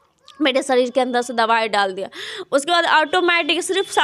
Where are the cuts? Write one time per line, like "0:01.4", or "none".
none